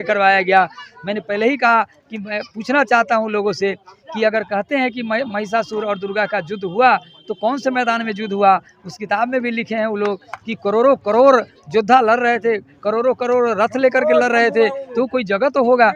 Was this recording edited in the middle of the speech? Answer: no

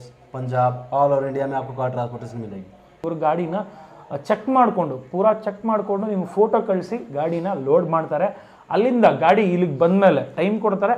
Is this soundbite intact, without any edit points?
no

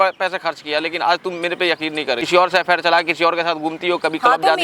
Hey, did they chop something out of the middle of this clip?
yes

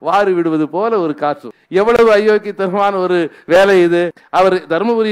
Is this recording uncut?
no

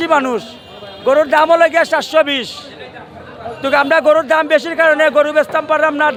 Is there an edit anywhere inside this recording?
no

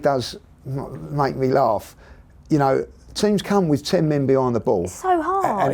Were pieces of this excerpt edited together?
yes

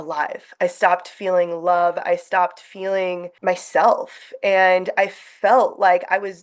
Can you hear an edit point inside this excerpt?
yes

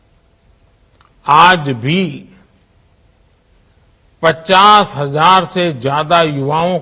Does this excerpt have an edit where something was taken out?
no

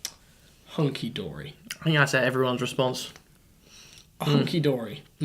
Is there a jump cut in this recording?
yes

